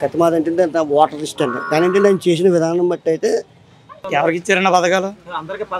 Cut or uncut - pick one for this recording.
cut